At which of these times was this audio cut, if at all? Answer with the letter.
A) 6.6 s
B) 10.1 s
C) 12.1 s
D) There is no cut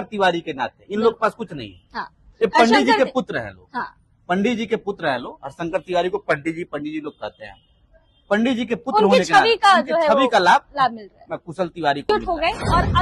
C